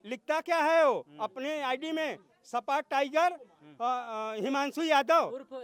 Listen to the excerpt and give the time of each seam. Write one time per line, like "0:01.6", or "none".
none